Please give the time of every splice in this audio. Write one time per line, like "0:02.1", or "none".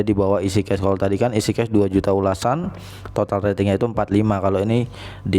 0:01.1